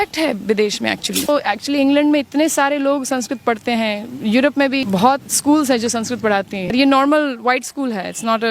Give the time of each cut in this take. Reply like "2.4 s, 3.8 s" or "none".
1.3 s, 4.8 s, 6.7 s

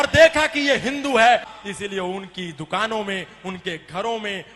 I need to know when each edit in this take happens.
1.5 s

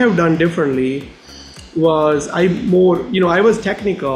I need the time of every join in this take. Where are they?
none

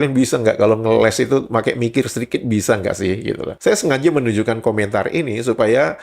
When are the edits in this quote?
3.5 s

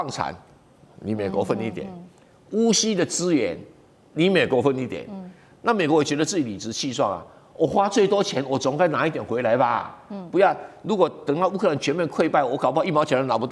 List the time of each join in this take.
none

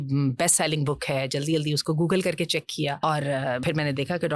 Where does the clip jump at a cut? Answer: 3.0 s, 3.6 s

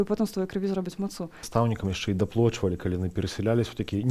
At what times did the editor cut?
1.4 s

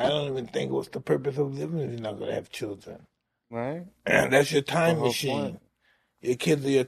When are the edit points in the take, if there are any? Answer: 3.9 s

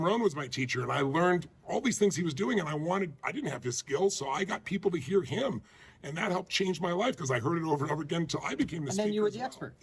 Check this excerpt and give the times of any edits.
none

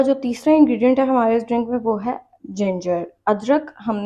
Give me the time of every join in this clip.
none

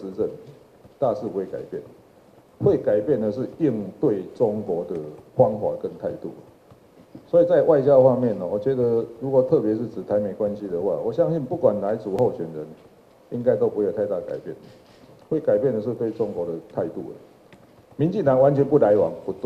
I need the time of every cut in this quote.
none

